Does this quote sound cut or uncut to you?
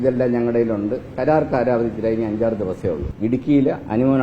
cut